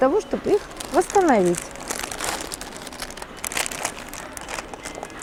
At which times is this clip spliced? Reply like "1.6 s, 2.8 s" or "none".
none